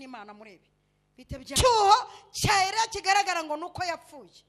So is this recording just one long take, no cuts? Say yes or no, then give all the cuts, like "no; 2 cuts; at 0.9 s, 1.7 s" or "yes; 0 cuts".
no; 1 cut; at 1.5 s